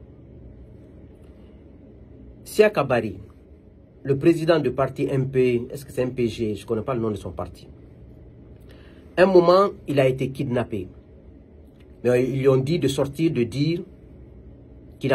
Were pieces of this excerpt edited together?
no; 0 cuts

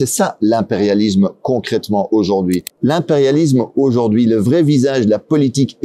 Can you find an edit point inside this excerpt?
yes; 1 cut; at 2.7 s

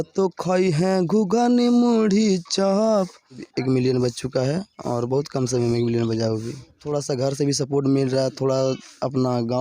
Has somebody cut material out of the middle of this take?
yes; 2 cuts; at 3.5 s, 6.8 s

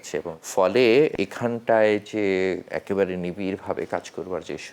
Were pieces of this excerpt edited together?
yes; 2 cuts; at 1.1 s, 2.7 s

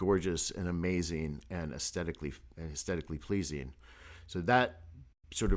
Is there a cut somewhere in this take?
no; 0 cuts

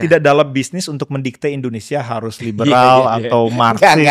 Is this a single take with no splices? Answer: yes; 0 cuts

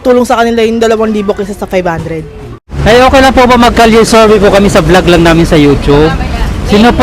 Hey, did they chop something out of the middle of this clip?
yes; 1 cut; at 2.7 s

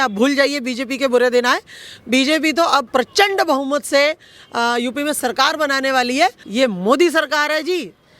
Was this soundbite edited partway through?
yes; 2 cuts; at 2.9 s, 6.4 s

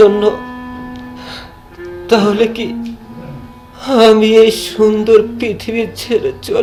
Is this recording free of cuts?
yes; 0 cuts

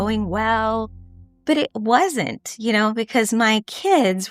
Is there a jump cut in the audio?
no; 0 cuts

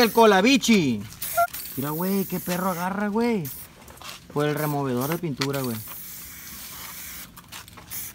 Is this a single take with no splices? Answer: no; 1 cut; at 1.4 s

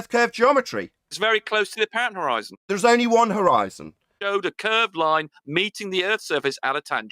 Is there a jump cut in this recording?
yes; 1 cut; at 4.1 s

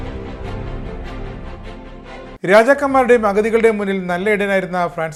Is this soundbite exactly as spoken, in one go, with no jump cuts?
yes; 0 cuts

